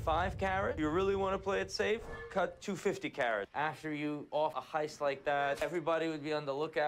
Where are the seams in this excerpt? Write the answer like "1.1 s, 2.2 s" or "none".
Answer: 3.5 s, 4.6 s, 5.6 s